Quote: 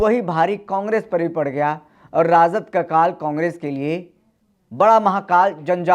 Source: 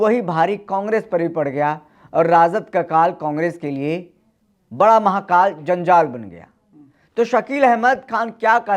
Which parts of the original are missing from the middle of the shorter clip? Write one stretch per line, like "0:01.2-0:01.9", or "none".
none